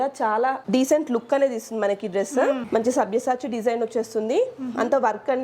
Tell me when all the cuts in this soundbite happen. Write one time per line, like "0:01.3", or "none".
0:02.7